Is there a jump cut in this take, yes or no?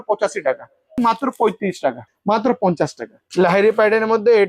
yes